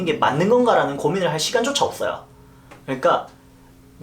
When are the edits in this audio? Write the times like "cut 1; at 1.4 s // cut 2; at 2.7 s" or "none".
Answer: cut 1; at 2.5 s